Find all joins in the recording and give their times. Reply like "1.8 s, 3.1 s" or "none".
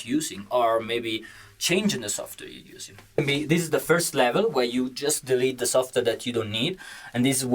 3.2 s